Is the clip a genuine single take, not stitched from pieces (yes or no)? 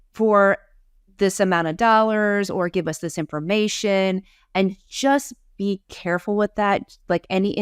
yes